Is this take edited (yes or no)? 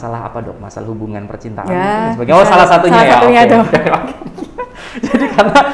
no